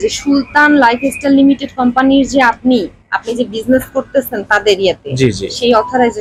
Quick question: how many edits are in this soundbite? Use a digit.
0